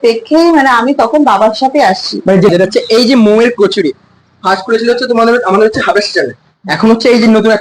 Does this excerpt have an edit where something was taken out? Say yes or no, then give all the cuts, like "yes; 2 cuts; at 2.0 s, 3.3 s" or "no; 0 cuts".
yes; 1 cut; at 2.5 s